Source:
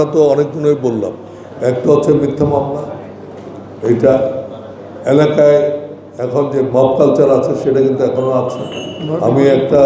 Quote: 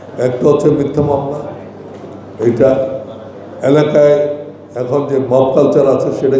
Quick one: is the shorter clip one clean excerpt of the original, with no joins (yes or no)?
yes